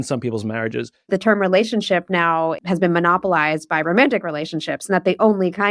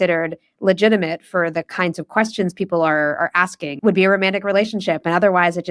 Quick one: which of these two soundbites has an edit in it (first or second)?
first